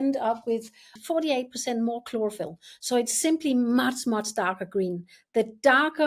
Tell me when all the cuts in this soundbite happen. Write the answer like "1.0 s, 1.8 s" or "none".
0.9 s